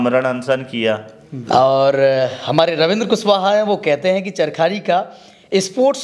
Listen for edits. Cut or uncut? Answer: cut